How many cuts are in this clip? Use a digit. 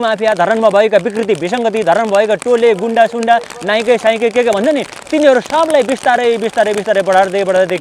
0